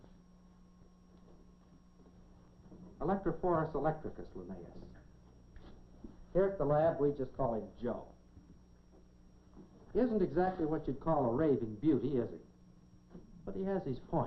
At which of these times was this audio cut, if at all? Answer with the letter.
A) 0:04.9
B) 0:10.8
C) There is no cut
B